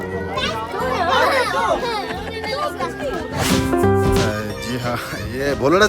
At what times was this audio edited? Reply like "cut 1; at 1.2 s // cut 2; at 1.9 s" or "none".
cut 1; at 3.4 s